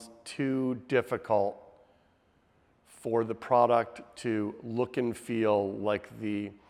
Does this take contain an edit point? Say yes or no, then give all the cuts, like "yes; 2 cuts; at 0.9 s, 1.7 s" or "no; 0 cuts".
no; 0 cuts